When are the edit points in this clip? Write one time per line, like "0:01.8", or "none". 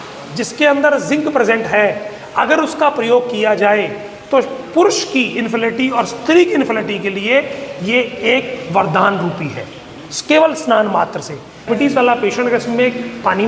0:11.7